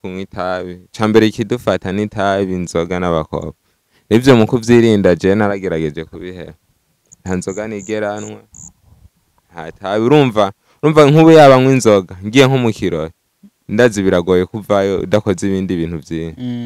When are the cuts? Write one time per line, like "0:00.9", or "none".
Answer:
none